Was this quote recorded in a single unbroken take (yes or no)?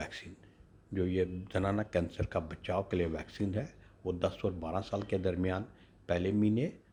yes